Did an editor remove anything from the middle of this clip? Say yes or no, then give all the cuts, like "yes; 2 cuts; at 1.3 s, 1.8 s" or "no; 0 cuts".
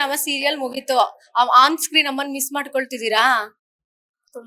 no; 0 cuts